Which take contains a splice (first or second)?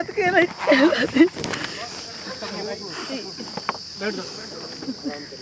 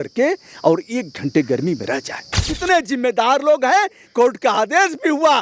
second